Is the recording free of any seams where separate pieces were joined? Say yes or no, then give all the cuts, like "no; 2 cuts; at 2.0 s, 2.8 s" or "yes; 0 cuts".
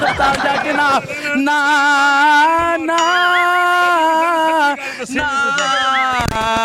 yes; 0 cuts